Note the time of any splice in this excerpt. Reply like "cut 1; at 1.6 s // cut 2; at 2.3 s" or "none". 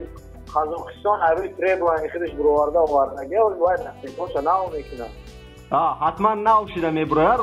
none